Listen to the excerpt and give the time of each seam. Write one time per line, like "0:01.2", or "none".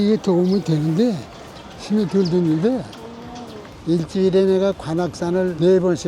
0:03.7